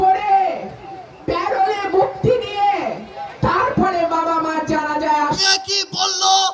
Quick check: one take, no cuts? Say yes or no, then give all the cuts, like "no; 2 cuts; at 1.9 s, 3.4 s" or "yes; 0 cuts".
no; 1 cut; at 5.4 s